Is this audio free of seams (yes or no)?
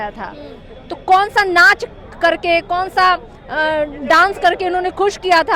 yes